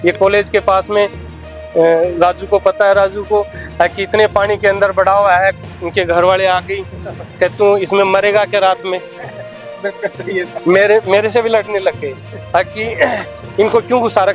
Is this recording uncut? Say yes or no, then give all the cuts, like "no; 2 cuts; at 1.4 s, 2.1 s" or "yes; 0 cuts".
yes; 0 cuts